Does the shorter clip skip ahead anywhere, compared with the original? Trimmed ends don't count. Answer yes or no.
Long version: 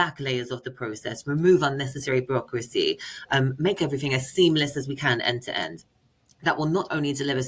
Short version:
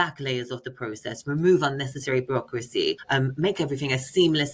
yes